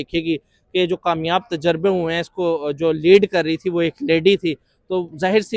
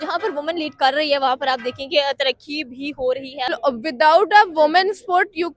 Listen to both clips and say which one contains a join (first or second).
second